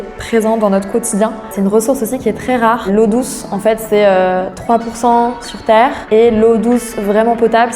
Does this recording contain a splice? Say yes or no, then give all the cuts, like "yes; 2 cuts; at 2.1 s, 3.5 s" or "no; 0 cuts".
yes; 2 cuts; at 1.4 s, 6.0 s